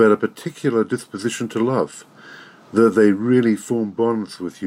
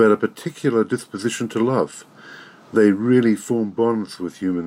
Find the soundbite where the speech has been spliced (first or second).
second